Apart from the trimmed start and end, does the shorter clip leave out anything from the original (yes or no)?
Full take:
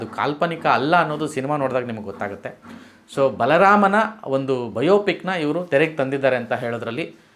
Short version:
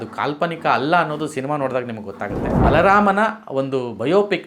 yes